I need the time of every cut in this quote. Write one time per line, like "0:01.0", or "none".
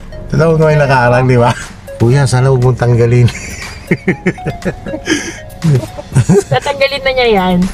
0:01.6